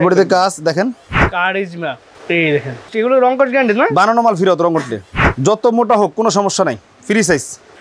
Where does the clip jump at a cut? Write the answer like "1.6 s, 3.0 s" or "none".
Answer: 1.2 s, 2.8 s, 5.2 s

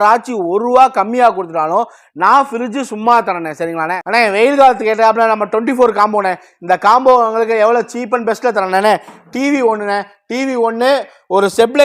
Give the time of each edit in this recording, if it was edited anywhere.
3.9 s

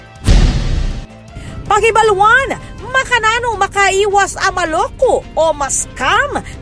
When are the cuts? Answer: 1.2 s

